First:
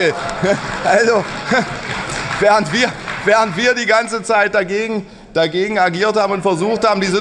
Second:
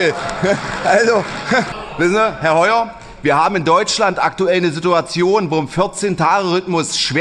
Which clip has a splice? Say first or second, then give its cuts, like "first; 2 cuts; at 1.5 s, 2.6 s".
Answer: second; 1 cut; at 1.8 s